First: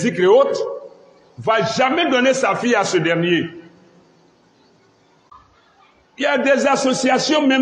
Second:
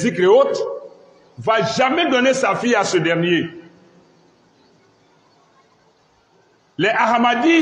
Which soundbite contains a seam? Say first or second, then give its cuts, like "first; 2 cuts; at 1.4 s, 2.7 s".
first; 1 cut; at 5.3 s